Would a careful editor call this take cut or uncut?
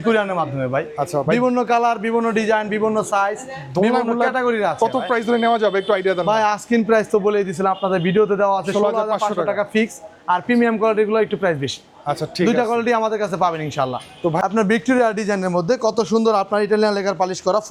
uncut